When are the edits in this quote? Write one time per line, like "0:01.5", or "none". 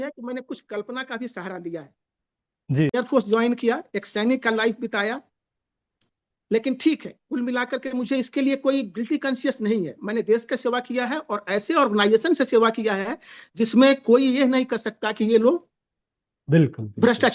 0:03.0